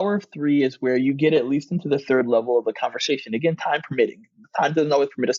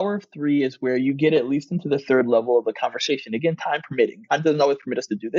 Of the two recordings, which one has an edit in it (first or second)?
second